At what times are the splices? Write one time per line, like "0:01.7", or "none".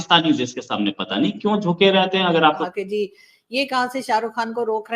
0:02.6